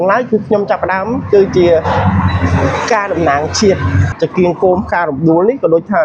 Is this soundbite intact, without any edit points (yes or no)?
no